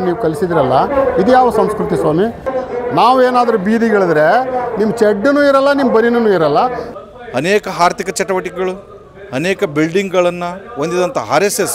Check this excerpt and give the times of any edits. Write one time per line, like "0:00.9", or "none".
0:02.4
0:06.9